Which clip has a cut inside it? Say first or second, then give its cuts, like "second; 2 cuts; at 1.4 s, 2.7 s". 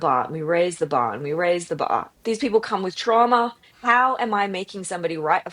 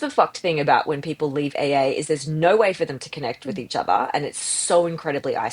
first; 2 cuts; at 2.1 s, 3.6 s